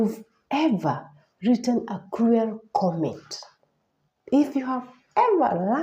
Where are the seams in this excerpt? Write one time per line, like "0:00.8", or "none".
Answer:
none